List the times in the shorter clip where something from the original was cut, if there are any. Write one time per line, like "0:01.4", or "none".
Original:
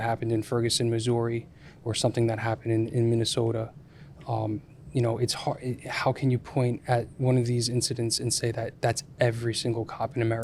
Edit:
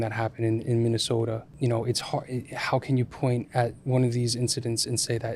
0:01.5